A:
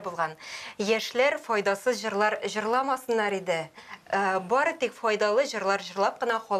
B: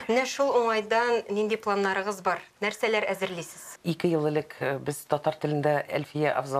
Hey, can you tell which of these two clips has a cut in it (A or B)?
B